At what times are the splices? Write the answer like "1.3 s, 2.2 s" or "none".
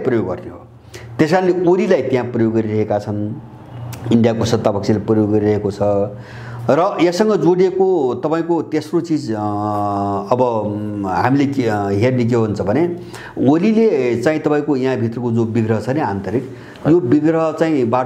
none